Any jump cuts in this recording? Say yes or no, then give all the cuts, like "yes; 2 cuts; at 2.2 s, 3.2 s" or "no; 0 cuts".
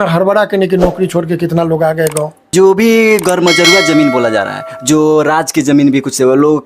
yes; 1 cut; at 2.4 s